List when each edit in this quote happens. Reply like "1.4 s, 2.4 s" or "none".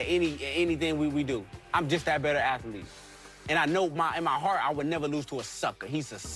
1.5 s